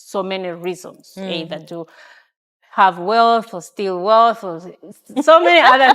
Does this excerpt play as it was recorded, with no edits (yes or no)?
yes